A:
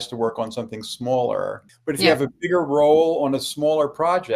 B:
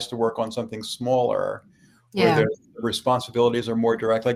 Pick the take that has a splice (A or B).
A